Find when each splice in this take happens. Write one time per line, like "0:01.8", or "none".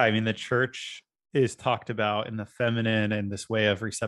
none